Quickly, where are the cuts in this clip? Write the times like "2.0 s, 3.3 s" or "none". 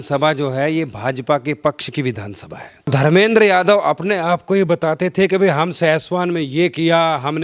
2.9 s